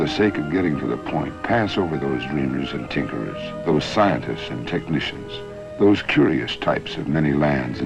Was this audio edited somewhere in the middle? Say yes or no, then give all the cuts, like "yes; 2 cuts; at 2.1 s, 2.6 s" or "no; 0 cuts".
yes; 1 cut; at 0.9 s